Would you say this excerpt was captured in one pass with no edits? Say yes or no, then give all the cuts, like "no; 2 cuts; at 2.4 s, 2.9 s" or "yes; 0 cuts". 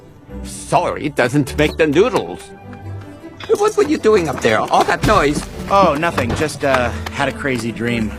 no; 1 cut; at 5.5 s